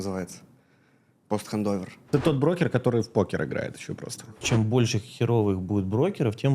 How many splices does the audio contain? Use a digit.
2